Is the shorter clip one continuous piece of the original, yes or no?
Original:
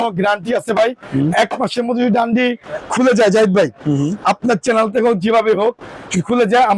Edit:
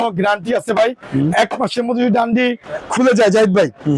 yes